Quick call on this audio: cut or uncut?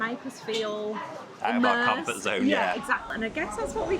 cut